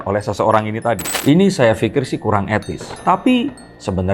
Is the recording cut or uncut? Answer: cut